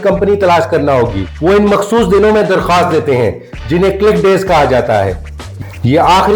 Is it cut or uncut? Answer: cut